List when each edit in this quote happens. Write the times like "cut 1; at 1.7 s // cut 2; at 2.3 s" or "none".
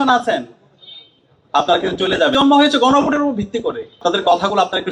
cut 1; at 2.3 s // cut 2; at 4.0 s